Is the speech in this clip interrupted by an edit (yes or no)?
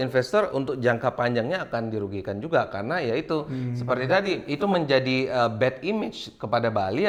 no